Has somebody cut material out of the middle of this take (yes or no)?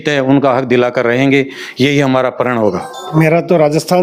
yes